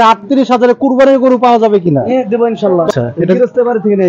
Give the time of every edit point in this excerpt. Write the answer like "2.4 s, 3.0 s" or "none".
2.9 s